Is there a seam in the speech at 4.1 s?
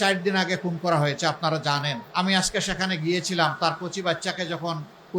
no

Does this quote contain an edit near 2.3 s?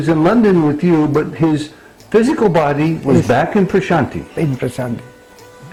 no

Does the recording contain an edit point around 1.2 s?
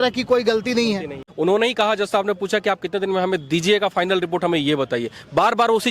yes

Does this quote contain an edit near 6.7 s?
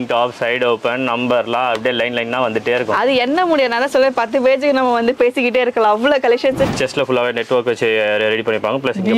yes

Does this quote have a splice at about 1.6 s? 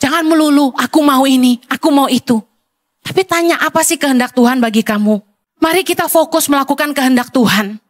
no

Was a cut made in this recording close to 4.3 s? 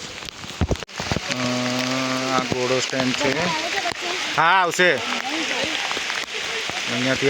no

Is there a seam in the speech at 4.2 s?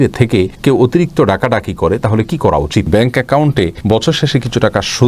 no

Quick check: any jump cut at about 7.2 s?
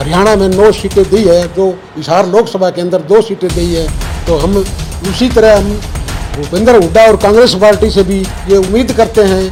no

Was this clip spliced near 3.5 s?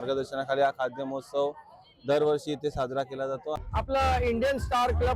yes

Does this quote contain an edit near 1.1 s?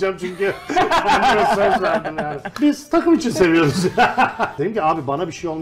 no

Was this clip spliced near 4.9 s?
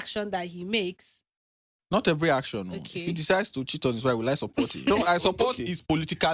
yes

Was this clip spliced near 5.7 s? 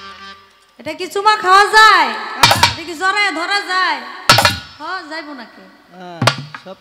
no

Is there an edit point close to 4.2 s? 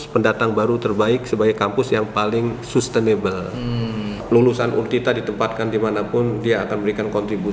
yes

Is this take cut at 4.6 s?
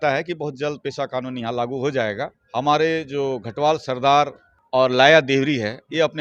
no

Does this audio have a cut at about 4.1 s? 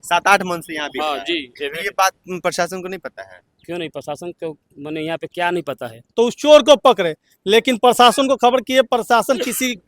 no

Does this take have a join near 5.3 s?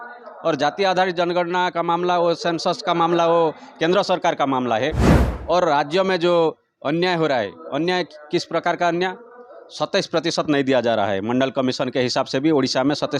yes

